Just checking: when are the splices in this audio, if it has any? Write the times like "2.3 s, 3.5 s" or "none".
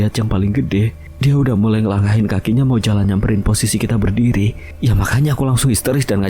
1.0 s, 4.6 s